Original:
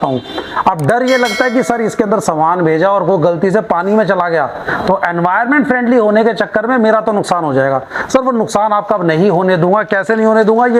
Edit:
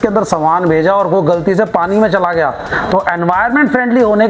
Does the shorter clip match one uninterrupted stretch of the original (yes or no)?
yes